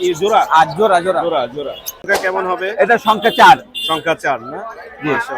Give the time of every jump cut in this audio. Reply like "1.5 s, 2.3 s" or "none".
2.0 s